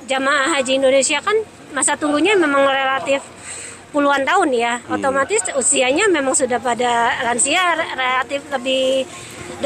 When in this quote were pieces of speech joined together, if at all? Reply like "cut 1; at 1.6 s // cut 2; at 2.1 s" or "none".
none